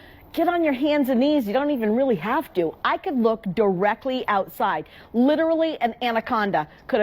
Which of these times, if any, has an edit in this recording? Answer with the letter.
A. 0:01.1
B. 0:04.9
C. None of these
B